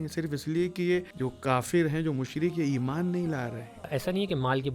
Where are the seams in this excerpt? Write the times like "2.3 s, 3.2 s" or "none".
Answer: 1.1 s, 3.9 s